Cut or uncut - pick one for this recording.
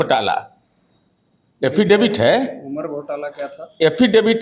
uncut